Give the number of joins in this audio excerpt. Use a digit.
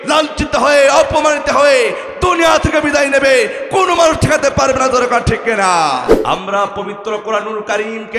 1